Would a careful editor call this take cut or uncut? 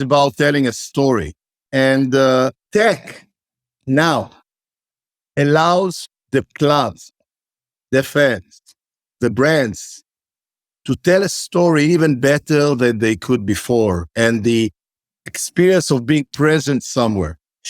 cut